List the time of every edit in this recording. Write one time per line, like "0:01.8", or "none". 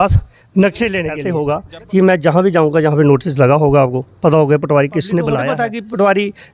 0:01.2
0:05.5